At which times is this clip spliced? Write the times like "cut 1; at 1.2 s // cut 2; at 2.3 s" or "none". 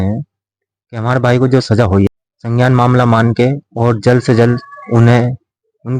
cut 1; at 2.1 s